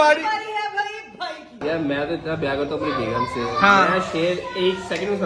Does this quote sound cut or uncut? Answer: uncut